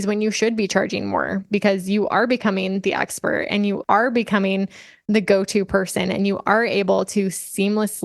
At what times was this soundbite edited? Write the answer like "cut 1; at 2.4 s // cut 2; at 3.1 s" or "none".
cut 1; at 3.8 s

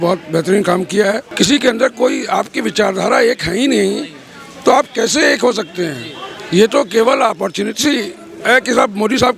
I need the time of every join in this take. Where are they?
cut 1; at 1.3 s

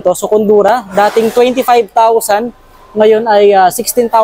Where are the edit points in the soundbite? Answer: none

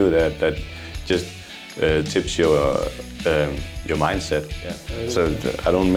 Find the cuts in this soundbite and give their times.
cut 1; at 4.9 s

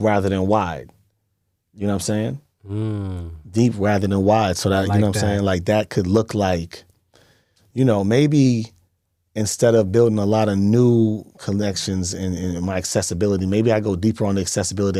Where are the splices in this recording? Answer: none

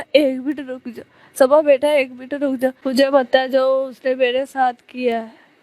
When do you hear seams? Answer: cut 1; at 2.8 s

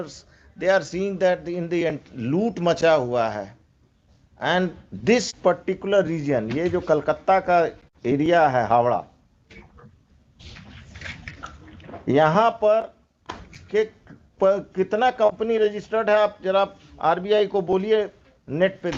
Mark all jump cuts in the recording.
none

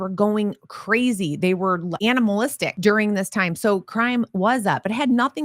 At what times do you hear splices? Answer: cut 1; at 1.9 s // cut 2; at 2.7 s

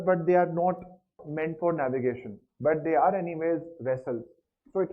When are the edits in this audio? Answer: cut 1; at 1.2 s

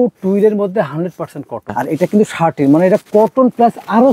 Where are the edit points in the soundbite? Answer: cut 1; at 1.7 s

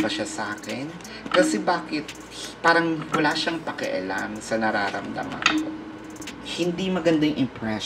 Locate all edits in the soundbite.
cut 1; at 6.2 s

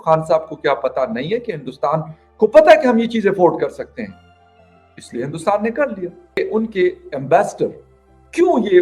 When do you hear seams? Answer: cut 1; at 6.4 s

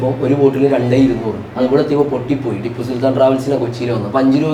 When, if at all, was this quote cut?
none

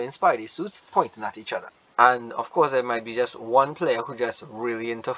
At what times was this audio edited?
cut 1; at 1.8 s

